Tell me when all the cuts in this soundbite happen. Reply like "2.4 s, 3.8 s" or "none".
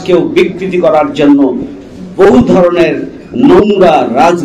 none